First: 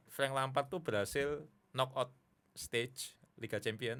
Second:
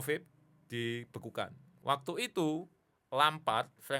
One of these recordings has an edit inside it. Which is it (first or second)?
second